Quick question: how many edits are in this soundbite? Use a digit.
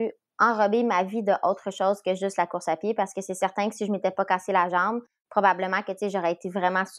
0